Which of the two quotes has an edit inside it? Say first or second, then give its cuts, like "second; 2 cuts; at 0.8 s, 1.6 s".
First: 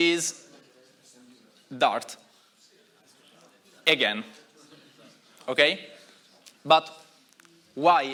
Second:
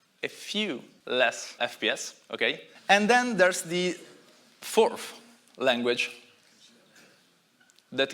second; 3 cuts; at 0.9 s, 1.6 s, 2.7 s